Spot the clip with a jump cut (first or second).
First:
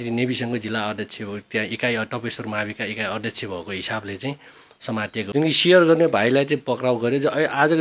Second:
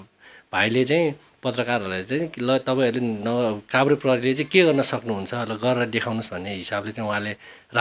first